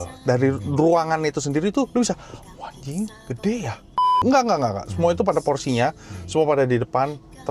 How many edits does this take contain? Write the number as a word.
two